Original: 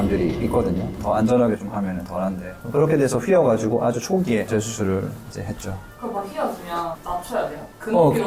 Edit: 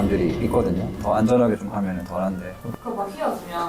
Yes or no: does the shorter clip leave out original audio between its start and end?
yes